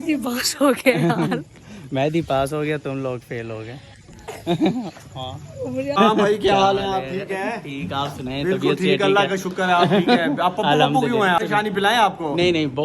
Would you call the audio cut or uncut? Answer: cut